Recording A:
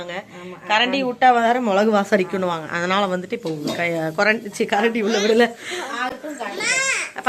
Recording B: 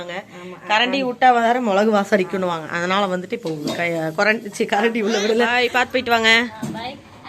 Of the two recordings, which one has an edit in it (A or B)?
B